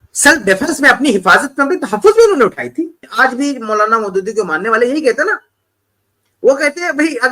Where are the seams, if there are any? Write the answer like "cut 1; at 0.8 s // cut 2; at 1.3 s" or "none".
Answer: cut 1; at 3.0 s